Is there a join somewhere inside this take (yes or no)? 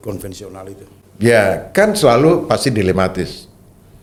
no